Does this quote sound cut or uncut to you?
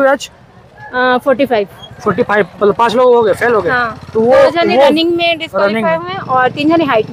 uncut